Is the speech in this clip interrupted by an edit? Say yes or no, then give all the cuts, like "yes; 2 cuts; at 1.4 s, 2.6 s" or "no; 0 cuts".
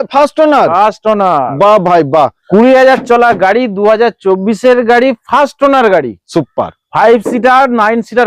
yes; 1 cut; at 2.4 s